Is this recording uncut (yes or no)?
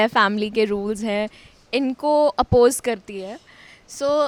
yes